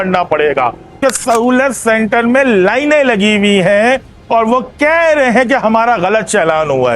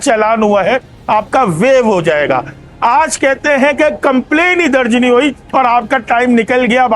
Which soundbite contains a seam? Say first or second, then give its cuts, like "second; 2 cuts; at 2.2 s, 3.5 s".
first; 1 cut; at 1.0 s